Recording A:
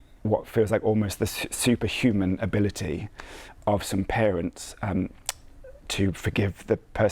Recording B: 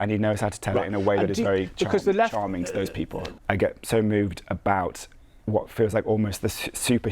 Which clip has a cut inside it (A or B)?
B